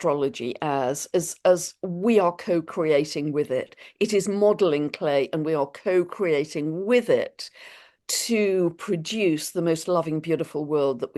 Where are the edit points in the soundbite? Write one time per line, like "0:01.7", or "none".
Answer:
none